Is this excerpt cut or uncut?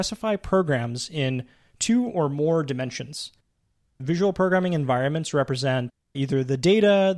cut